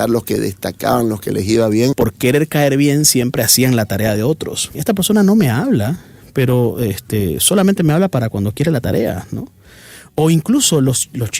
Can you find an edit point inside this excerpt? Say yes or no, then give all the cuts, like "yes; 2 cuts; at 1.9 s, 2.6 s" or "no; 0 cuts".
yes; 2 cuts; at 1.9 s, 4.8 s